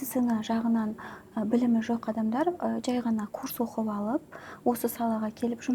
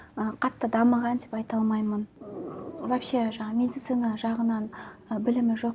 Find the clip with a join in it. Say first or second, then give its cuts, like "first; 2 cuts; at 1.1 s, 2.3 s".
second; 1 cut; at 2.2 s